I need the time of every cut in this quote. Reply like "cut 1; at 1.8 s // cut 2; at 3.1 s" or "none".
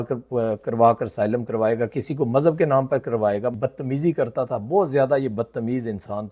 cut 1; at 3.6 s